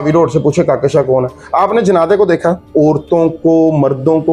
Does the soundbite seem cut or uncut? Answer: cut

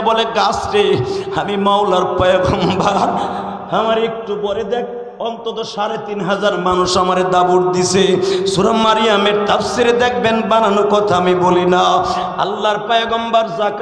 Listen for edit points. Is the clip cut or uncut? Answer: uncut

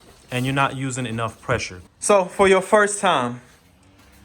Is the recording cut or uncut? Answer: cut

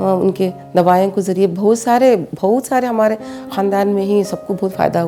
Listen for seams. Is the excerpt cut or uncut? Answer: uncut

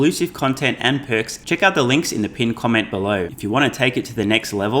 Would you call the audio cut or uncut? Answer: cut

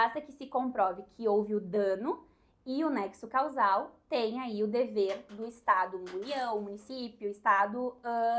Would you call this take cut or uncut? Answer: uncut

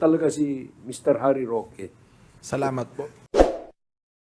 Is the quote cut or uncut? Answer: uncut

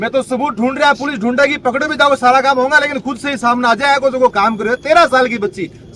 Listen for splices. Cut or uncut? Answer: uncut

